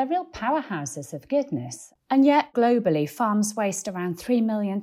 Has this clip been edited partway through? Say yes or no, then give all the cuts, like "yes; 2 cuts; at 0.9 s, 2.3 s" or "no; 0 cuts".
yes; 2 cuts; at 1.8 s, 2.5 s